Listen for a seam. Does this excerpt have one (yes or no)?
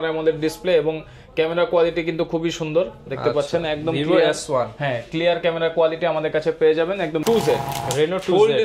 yes